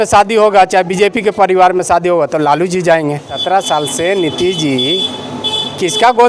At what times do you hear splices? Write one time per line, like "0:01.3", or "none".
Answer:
0:03.3